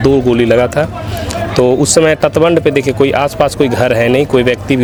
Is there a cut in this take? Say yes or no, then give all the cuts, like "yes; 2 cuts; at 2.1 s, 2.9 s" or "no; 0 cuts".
no; 0 cuts